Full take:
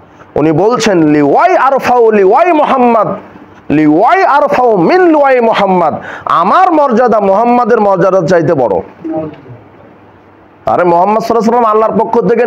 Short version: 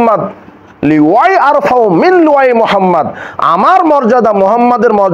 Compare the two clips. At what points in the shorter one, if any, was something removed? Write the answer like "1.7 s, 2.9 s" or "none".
none